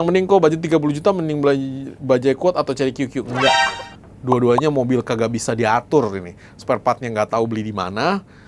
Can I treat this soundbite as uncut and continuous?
yes; 0 cuts

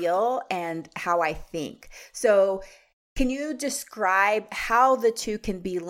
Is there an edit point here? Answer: no; 0 cuts

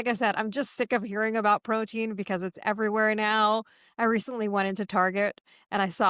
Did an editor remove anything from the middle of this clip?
no; 0 cuts

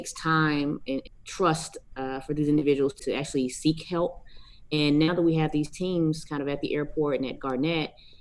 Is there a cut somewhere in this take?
yes; 2 cuts; at 1.0 s, 3.0 s

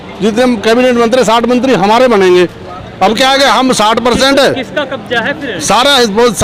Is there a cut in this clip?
no; 0 cuts

